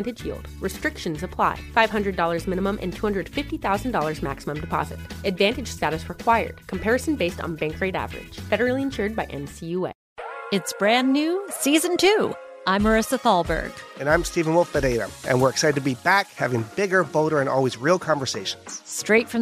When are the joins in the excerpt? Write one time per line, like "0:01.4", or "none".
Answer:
0:10.1